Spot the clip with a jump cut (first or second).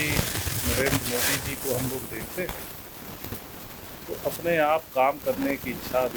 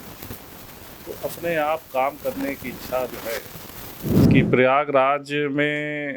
second